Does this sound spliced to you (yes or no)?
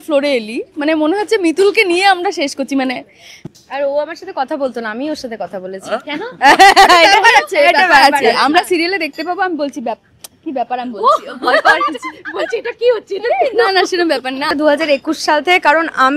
yes